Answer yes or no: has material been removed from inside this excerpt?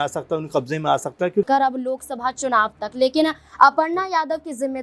yes